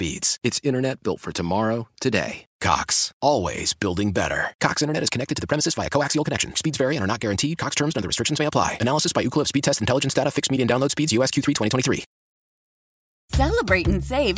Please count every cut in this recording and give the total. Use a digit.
1